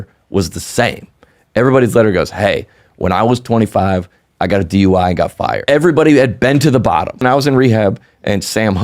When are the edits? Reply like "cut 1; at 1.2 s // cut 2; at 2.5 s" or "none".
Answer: cut 1; at 5.7 s // cut 2; at 7.2 s